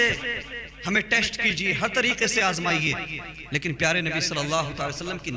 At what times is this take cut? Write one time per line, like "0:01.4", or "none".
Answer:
none